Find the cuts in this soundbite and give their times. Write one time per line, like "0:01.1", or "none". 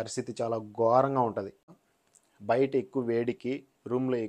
0:01.6